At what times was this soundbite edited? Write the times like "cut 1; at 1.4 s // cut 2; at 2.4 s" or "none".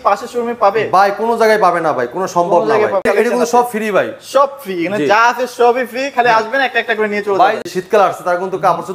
cut 1; at 3.1 s // cut 2; at 7.6 s